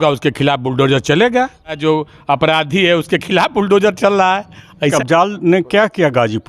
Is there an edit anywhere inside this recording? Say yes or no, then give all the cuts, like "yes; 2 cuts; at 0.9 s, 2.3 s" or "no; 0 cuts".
yes; 2 cuts; at 1.8 s, 4.9 s